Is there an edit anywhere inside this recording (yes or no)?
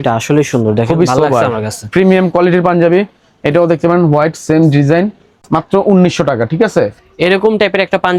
no